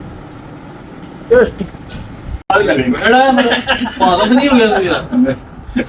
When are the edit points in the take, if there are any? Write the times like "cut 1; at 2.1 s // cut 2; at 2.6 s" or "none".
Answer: cut 1; at 2.5 s

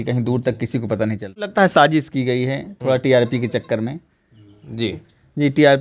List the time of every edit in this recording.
cut 1; at 1.5 s

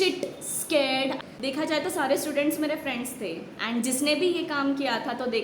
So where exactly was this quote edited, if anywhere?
cut 1; at 1.2 s

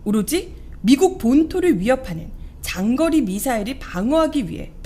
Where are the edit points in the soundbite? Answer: cut 1; at 3.8 s

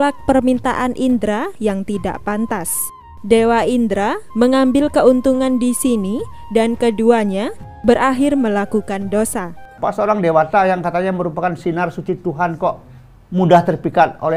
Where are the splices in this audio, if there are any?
cut 1; at 9.7 s

